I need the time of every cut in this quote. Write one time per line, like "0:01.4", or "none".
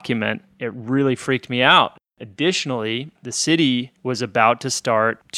0:02.1
0:03.2